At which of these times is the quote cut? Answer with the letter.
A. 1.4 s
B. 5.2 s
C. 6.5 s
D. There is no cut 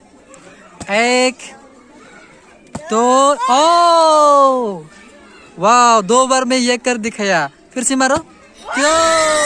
D